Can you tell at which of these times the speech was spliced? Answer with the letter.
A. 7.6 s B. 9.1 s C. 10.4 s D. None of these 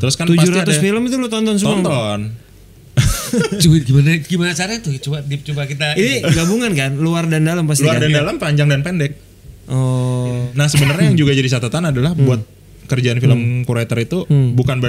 C